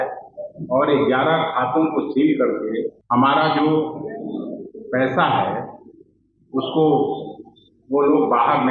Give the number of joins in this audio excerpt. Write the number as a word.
one